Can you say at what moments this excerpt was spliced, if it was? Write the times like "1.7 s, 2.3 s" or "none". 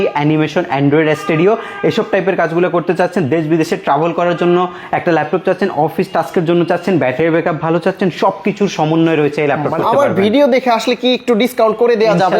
9.8 s